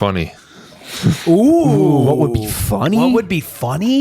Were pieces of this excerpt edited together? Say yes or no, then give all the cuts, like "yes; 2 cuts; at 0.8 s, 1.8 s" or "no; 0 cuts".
no; 0 cuts